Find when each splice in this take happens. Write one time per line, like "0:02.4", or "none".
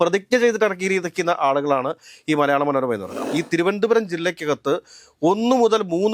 0:03.2